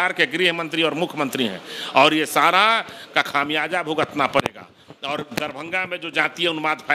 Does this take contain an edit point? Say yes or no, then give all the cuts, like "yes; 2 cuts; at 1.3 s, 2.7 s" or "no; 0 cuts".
no; 0 cuts